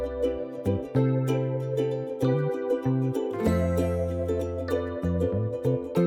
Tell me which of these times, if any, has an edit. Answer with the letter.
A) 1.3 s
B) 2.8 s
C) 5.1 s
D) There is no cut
D